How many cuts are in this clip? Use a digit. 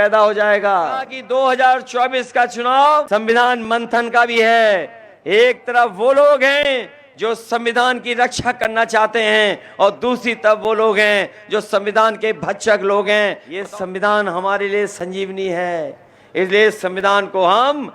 3